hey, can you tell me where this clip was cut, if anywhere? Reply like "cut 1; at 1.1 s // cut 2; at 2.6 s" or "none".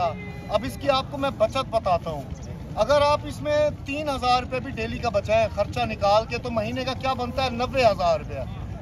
none